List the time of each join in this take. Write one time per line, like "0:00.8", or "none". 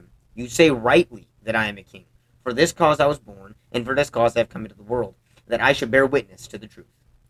none